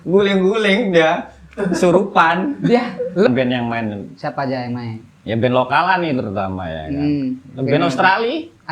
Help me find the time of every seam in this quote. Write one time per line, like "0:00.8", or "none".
0:03.3